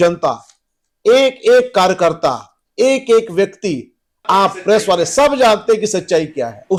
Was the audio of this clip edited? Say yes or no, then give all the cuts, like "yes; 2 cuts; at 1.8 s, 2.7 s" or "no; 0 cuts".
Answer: no; 0 cuts